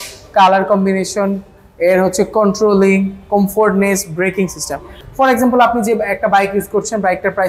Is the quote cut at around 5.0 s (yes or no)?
yes